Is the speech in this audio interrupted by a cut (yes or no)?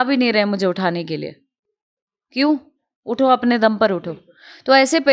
no